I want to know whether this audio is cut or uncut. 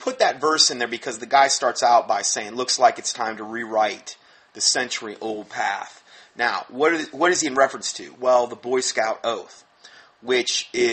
uncut